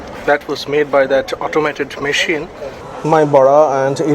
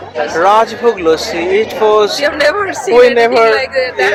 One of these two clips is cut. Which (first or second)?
first